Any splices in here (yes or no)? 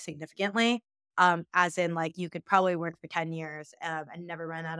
no